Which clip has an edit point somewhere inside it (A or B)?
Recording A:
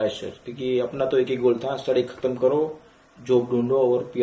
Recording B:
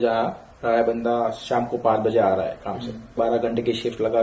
B